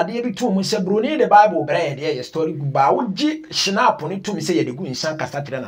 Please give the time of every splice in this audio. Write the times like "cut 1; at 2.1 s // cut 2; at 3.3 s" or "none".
none